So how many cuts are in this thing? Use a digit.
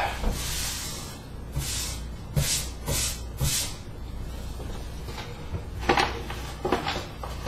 1